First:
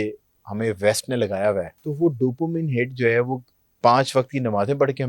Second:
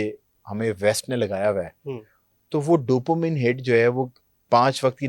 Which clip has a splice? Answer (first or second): first